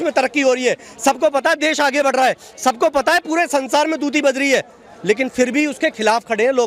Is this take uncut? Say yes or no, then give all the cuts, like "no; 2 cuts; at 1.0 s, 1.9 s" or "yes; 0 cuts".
yes; 0 cuts